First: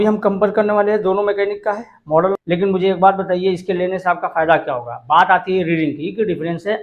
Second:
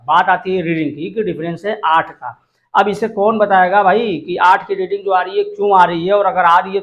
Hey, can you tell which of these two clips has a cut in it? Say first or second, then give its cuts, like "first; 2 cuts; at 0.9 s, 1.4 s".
first; 1 cut; at 2.4 s